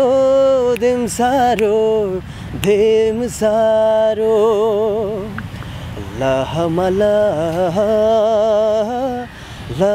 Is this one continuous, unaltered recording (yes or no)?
yes